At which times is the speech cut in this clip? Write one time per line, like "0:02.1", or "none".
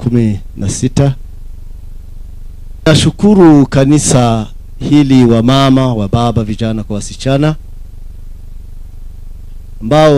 0:02.9